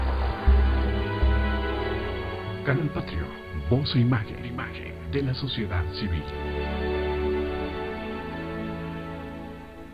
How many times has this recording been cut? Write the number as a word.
zero